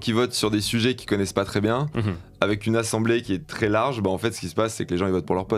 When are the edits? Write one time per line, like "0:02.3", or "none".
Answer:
none